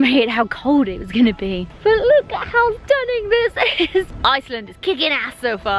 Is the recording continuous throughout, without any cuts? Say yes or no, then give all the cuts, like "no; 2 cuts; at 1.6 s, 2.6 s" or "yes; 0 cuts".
yes; 0 cuts